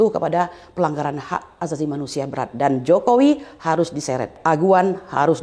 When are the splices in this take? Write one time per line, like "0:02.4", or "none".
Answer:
0:04.4